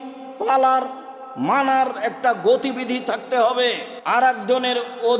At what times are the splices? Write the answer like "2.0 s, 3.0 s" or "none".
3.9 s